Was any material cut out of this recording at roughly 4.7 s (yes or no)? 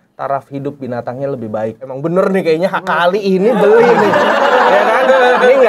no